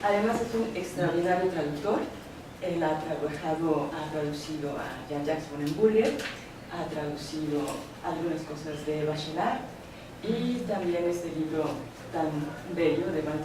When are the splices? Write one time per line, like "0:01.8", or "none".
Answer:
0:01.0

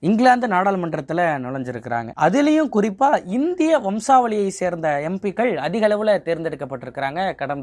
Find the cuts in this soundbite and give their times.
none

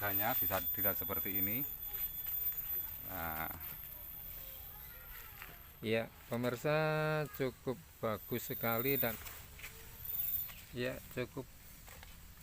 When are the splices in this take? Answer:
0:09.1

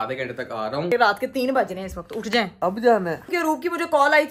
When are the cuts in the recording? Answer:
0:00.9
0:02.5
0:03.3

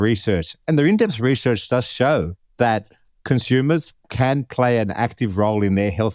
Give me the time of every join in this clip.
0:02.4

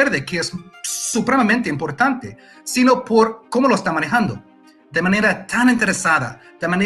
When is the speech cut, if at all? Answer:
none

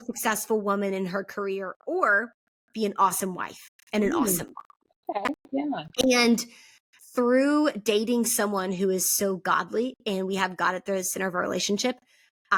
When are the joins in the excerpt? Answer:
none

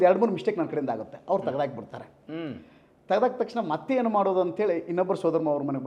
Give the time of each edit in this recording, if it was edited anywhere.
none

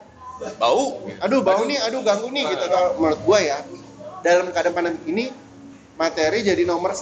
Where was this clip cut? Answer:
0:02.8

